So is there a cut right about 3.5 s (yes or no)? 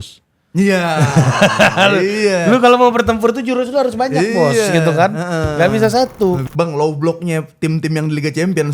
no